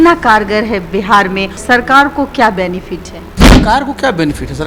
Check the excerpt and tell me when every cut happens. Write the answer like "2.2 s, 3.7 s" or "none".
1.6 s, 3.6 s